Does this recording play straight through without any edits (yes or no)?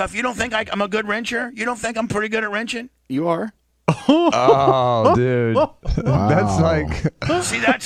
yes